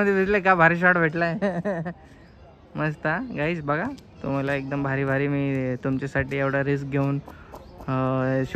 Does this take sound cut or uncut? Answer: uncut